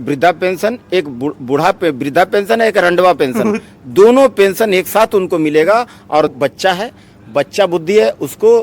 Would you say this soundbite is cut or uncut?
cut